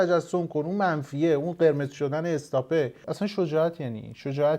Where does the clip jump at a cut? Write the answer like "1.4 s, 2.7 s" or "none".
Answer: 3.0 s